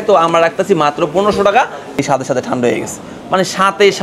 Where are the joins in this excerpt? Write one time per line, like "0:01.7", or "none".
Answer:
0:01.9